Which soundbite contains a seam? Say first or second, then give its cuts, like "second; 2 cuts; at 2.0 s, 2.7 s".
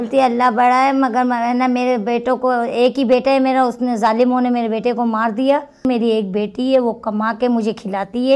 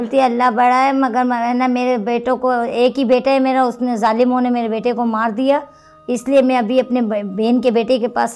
first; 1 cut; at 5.9 s